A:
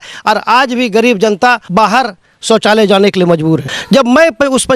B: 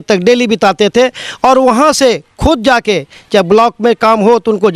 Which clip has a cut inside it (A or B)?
A